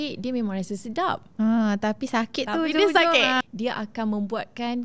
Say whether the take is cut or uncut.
cut